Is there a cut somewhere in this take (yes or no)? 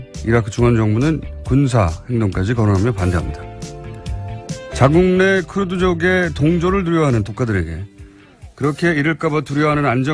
no